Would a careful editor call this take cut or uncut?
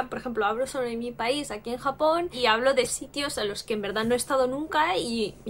uncut